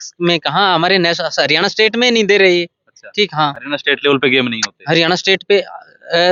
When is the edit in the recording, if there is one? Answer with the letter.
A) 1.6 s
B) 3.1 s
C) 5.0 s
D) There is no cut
D